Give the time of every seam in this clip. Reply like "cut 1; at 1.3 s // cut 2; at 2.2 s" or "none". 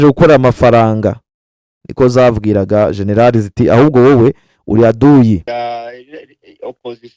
cut 1; at 5.5 s